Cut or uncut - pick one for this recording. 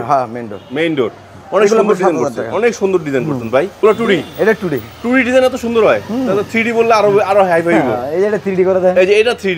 cut